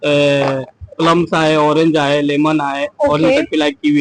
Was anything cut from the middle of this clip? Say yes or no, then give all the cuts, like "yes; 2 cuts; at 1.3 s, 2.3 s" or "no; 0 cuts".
no; 0 cuts